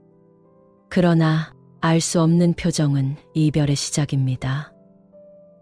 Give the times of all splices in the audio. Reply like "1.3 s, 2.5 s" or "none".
0.8 s, 4.7 s

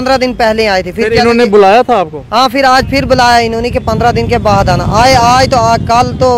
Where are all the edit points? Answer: none

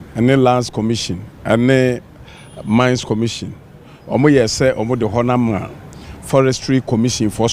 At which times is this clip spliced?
none

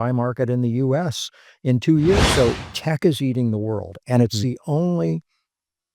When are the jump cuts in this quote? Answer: 2.3 s

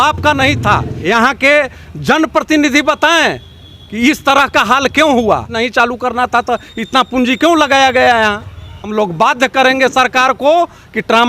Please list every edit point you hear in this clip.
0.9 s, 5.5 s, 8.5 s

